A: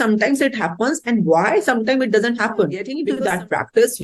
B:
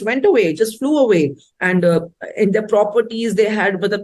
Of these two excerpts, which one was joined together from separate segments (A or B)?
A